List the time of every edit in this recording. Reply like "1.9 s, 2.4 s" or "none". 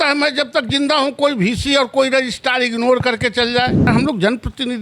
3.8 s